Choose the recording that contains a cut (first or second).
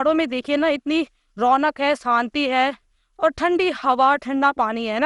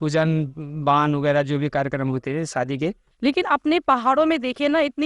second